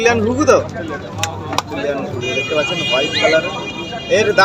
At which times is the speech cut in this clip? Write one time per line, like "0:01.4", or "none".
none